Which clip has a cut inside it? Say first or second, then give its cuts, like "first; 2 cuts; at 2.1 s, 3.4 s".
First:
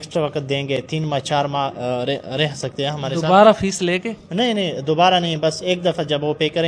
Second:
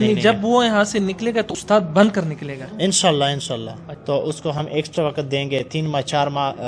second; 2 cuts; at 1.5 s, 3.9 s